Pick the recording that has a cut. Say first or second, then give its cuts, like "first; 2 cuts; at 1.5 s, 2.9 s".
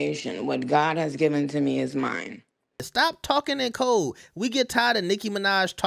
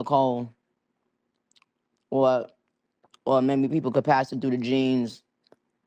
first; 1 cut; at 2.9 s